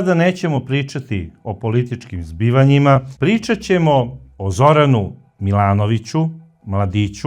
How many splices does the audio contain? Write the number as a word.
one